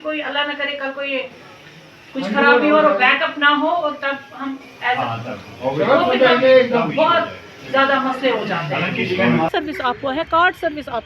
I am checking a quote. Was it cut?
yes; 1 cut; at 9.5 s

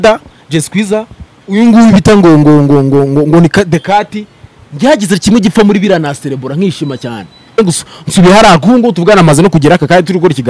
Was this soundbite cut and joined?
yes; 1 cut; at 7.6 s

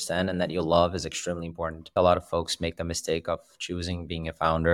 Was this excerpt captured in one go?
no; 1 cut; at 1.9 s

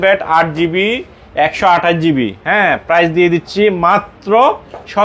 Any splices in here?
no; 0 cuts

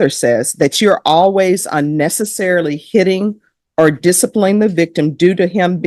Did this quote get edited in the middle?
no; 0 cuts

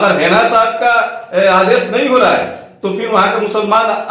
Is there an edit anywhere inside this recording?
no; 0 cuts

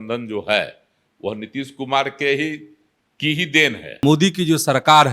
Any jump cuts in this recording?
yes; 1 cut; at 4.0 s

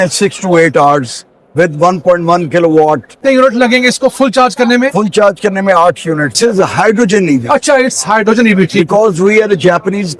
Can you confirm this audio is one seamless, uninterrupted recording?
no; 2 cuts; at 3.1 s, 6.4 s

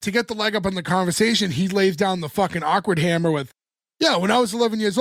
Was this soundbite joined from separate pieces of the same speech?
no; 0 cuts

